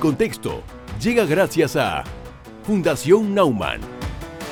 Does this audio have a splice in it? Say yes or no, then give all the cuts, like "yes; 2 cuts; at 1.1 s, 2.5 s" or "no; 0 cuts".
no; 0 cuts